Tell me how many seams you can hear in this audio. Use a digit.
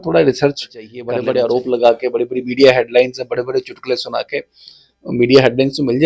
1